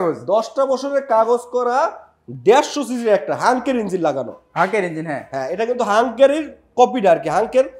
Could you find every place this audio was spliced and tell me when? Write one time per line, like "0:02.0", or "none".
none